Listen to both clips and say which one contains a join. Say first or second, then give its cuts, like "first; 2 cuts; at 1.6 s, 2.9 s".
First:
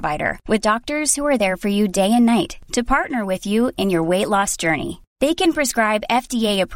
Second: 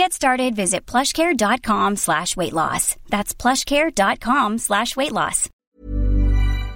second; 1 cut; at 5.5 s